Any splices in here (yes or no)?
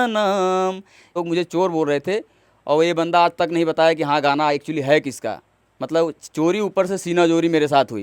yes